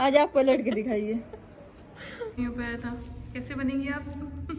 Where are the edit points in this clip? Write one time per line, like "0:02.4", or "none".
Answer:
0:02.4